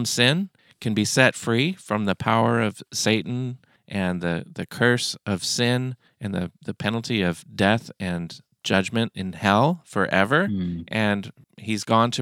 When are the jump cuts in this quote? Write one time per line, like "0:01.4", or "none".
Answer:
none